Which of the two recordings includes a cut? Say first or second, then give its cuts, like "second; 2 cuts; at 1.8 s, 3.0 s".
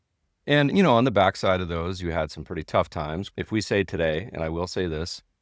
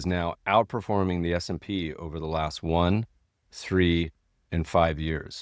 first; 1 cut; at 3.3 s